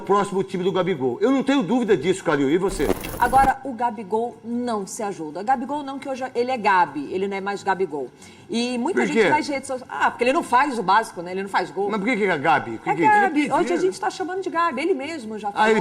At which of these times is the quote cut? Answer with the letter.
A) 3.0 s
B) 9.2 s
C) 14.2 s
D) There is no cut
A